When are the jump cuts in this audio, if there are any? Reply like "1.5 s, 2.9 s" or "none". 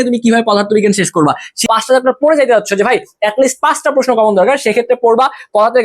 1.6 s